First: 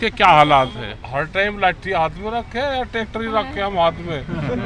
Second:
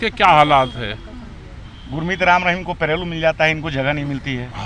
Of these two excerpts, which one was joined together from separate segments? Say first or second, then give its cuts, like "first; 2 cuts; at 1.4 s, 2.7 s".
first; 1 cut; at 0.9 s